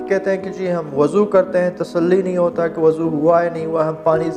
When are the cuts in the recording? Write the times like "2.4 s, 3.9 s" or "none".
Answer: none